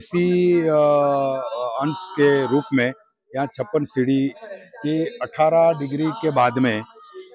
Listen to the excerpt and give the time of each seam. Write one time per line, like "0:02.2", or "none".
0:04.5